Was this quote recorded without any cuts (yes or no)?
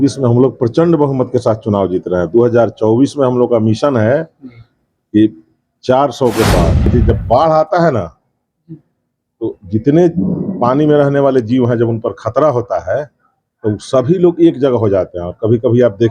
no